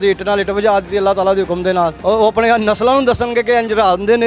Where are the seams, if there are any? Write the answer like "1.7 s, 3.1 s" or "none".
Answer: 2.0 s